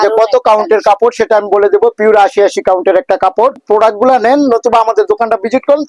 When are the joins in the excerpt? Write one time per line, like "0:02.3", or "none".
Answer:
0:03.6